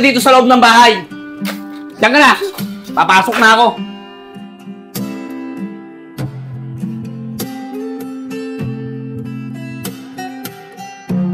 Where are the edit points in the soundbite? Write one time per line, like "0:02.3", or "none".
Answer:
none